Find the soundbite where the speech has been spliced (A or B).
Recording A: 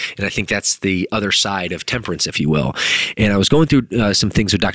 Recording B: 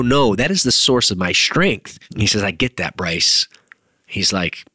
B